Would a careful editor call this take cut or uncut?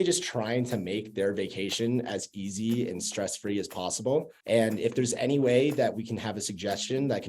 cut